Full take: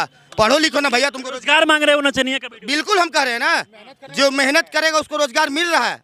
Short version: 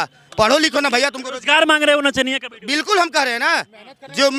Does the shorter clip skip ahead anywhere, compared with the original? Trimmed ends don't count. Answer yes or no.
no